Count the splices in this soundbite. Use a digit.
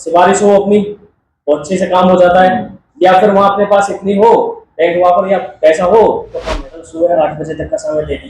1